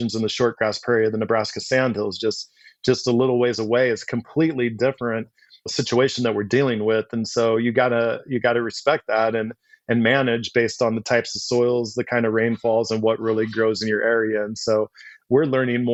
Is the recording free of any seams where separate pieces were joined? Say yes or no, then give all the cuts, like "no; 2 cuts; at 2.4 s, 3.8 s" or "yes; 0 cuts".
yes; 0 cuts